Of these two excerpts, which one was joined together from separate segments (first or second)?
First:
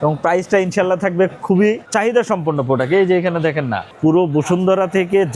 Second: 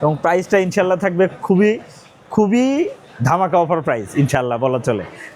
first